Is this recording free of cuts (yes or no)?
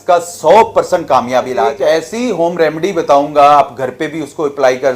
no